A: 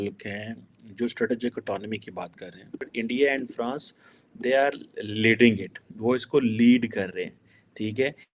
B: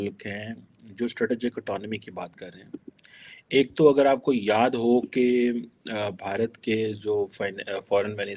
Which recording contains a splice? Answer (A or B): A